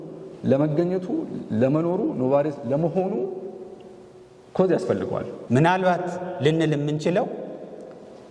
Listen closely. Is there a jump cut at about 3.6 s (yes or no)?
no